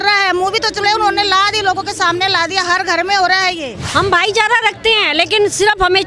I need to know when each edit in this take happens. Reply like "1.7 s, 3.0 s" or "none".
3.7 s